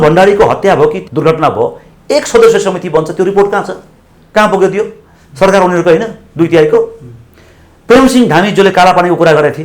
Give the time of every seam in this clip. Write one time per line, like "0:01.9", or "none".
0:01.0